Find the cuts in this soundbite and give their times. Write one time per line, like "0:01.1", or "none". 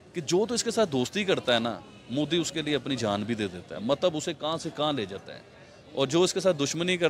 none